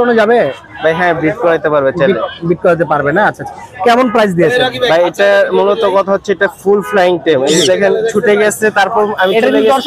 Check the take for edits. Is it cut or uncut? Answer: uncut